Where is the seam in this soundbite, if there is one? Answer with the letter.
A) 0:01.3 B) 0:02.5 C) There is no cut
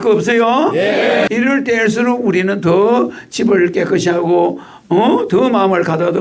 A